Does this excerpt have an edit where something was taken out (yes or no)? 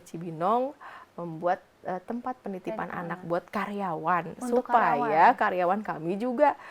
no